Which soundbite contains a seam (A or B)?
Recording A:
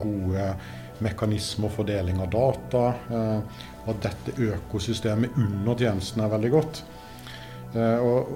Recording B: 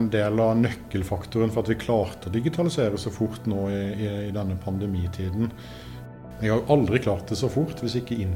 B